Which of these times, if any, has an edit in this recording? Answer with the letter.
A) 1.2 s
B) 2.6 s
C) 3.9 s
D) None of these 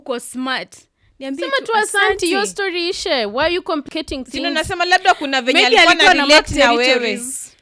C